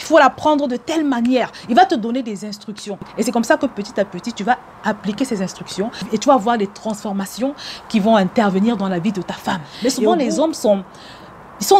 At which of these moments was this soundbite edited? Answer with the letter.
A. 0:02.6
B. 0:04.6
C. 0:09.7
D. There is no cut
C